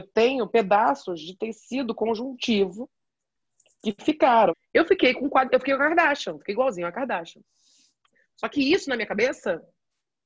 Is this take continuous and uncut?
no; 1 cut; at 4.5 s

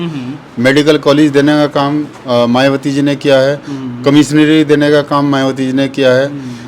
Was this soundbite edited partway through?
no; 0 cuts

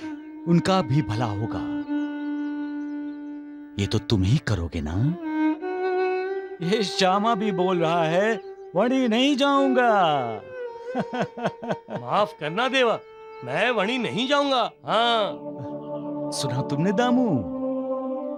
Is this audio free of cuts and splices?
yes; 0 cuts

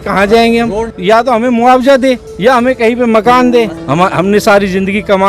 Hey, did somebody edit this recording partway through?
yes; 2 cuts; at 0.9 s, 3.8 s

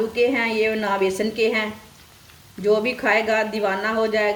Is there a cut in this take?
no; 0 cuts

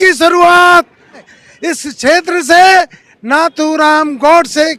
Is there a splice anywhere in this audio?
yes; 1 cut; at 1.2 s

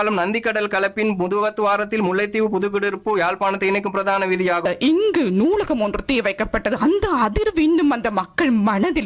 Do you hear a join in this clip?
yes; 1 cut; at 4.6 s

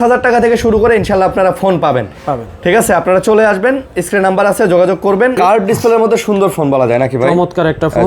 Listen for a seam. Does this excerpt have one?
yes; 1 cut; at 5.4 s

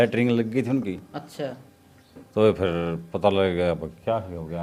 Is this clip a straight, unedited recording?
yes; 0 cuts

